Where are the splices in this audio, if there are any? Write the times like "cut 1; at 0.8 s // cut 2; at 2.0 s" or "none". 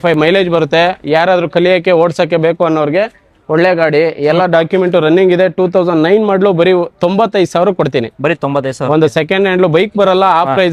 none